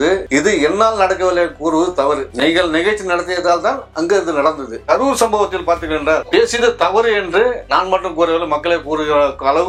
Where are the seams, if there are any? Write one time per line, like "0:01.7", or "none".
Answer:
none

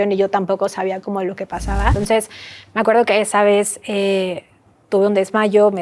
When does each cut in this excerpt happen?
0:02.0

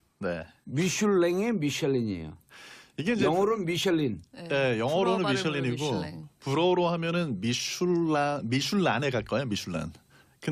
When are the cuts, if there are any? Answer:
none

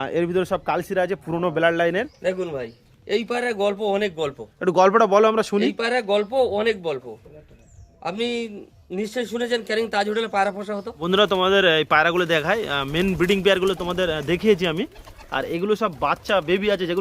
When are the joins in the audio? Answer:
0:02.1
0:11.0

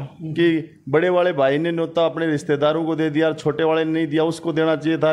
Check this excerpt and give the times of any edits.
none

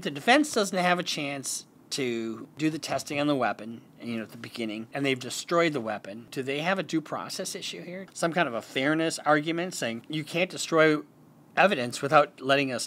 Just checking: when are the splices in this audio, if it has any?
0:02.5
0:04.9
0:06.2
0:08.0
0:10.1

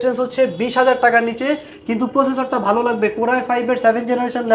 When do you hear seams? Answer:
none

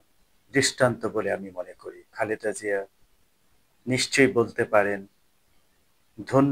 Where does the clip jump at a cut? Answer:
0:02.1

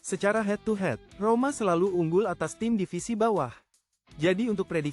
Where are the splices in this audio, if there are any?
0:01.1

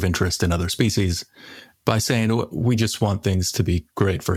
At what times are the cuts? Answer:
none

